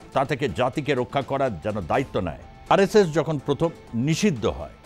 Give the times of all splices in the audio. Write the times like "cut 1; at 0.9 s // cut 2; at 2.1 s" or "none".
cut 1; at 2.7 s